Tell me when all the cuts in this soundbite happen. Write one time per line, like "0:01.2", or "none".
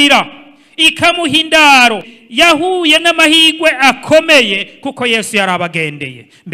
0:02.1